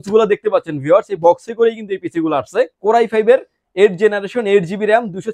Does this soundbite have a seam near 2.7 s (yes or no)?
yes